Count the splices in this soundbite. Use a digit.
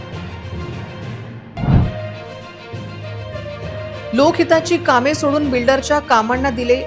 1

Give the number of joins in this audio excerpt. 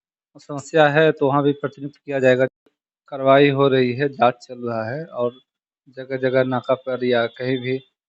1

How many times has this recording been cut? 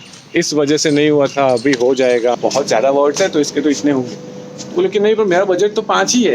1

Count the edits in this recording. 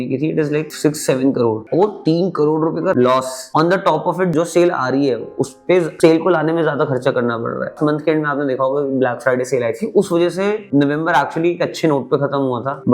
3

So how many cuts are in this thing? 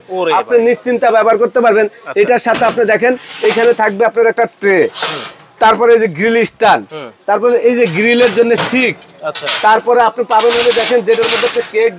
0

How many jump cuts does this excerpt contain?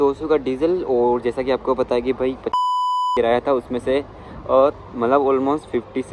0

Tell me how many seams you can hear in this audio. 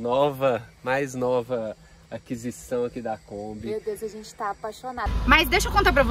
1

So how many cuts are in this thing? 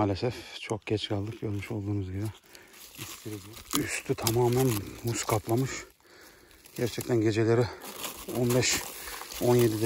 1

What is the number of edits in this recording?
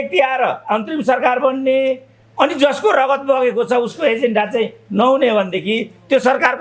0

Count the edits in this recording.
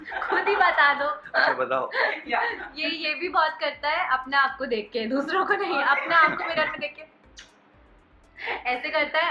0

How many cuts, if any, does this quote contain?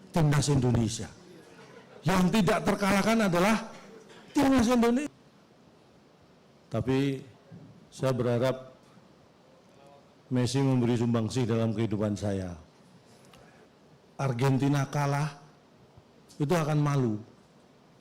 2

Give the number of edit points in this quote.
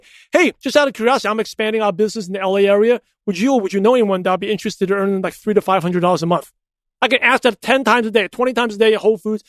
1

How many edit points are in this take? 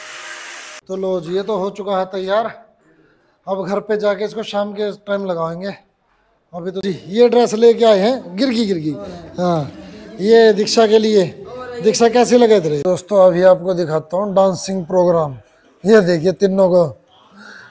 3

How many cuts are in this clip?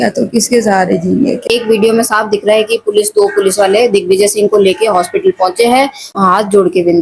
2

